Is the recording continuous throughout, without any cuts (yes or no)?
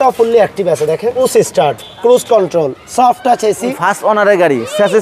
no